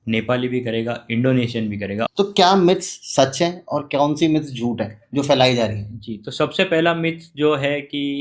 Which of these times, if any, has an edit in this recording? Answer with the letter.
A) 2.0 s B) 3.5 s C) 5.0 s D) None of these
A